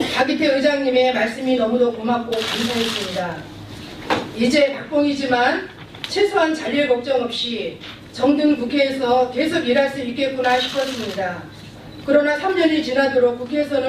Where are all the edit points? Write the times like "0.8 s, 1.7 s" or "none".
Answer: 7.6 s